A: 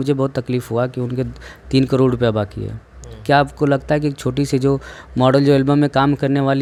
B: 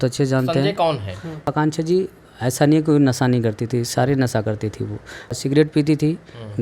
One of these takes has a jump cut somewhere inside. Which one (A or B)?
B